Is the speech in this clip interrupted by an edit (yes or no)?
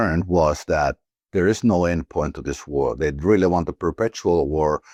no